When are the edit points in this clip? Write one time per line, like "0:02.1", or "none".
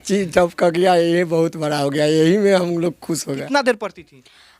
0:03.5